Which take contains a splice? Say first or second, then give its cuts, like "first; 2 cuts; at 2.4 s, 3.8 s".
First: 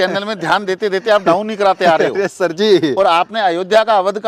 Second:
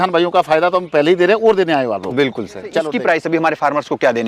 second; 1 cut; at 2.8 s